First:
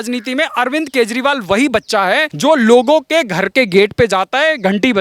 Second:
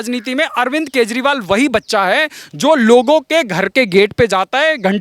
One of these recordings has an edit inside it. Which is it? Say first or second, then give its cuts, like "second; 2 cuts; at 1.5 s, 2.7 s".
first; 1 cut; at 2.3 s